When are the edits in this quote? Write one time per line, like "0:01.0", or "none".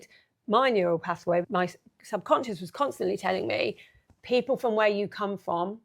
0:01.4

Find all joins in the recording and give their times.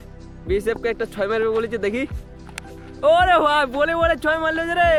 none

